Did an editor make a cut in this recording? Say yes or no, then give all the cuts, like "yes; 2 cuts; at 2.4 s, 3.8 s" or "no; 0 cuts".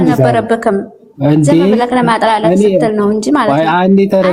no; 0 cuts